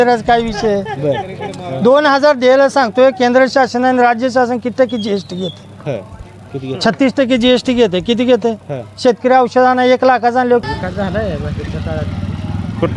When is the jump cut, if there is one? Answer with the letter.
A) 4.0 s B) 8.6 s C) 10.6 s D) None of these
C